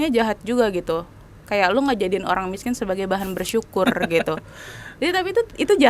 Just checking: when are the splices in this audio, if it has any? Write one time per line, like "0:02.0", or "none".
none